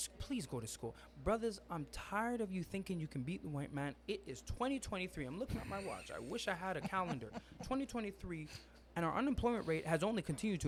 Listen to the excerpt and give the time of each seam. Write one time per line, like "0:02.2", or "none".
none